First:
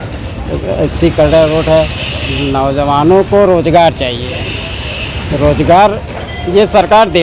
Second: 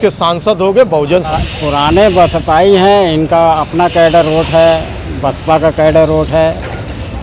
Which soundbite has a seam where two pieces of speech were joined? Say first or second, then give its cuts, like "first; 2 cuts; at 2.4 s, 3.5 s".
second; 1 cut; at 1.3 s